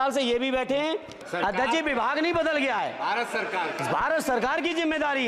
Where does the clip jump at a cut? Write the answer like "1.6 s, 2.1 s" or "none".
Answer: 1.2 s

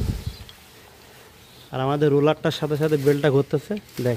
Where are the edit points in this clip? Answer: none

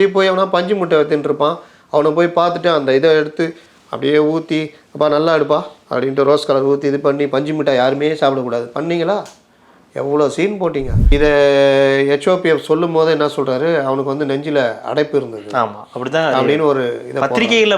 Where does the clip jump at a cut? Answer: 11.0 s

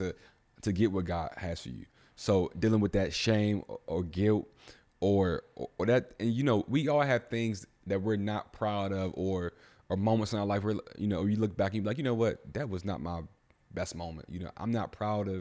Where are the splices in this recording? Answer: none

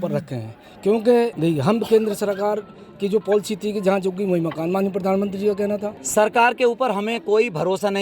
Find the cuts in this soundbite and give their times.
1.3 s, 6.0 s

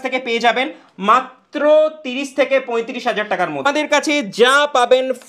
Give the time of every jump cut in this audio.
3.6 s

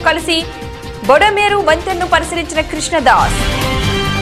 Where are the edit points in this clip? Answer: none

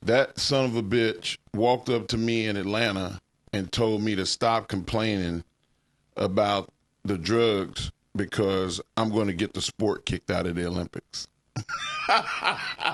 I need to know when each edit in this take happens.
none

